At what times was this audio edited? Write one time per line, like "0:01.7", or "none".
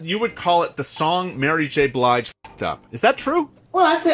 none

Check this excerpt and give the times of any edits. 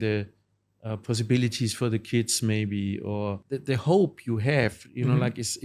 0:03.4

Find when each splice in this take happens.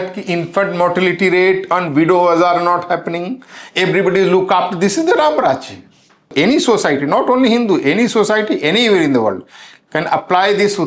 0:06.3

